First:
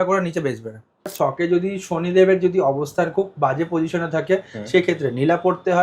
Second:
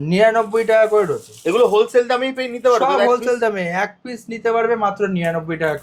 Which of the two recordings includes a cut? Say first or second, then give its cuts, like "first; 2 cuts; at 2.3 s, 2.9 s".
first; 1 cut; at 1.1 s